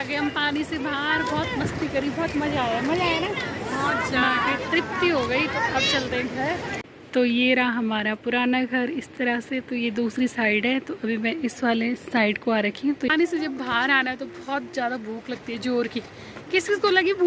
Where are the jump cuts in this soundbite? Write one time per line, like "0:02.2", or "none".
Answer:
0:06.8
0:13.1